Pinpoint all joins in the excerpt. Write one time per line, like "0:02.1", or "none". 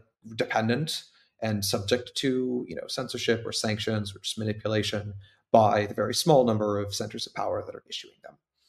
none